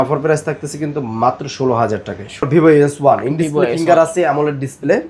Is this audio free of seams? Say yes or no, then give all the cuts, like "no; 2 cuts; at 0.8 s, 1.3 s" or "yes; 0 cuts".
no; 1 cut; at 2.4 s